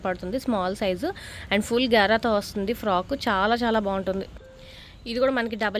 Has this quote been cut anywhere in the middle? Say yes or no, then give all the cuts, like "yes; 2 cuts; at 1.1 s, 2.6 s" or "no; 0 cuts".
no; 0 cuts